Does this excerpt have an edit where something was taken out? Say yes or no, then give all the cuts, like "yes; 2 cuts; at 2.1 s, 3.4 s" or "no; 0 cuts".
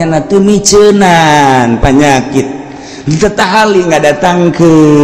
no; 0 cuts